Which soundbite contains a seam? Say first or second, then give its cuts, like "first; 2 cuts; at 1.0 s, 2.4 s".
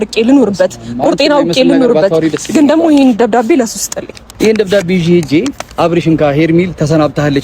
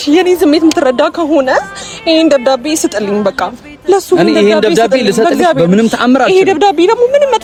first; 1 cut; at 4.2 s